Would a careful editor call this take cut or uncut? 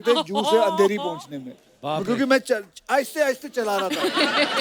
uncut